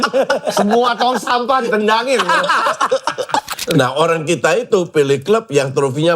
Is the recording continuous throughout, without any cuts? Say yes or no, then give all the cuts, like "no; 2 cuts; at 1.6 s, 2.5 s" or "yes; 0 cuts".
no; 1 cut; at 3.5 s